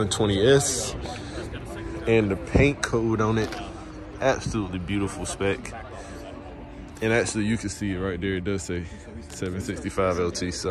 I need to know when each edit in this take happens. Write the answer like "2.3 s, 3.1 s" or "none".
none

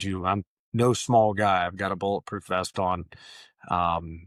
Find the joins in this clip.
none

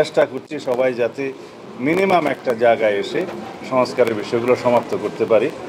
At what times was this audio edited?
none

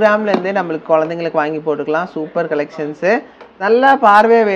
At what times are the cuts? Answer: 3.6 s

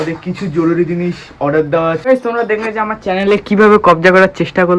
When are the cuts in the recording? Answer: 2.0 s

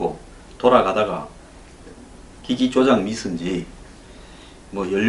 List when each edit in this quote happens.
none

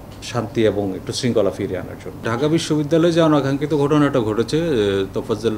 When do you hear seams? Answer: 2.1 s

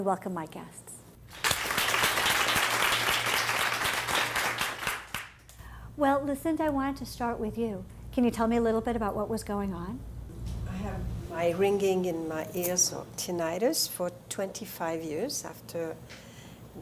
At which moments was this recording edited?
none

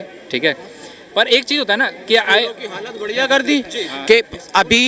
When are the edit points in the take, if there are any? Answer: none

